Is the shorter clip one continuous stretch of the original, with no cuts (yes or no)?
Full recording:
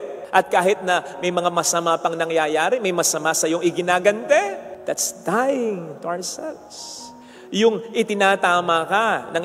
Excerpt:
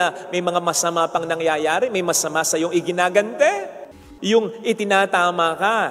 no